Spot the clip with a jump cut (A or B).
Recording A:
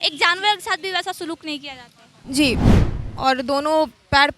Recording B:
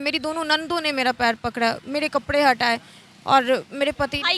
A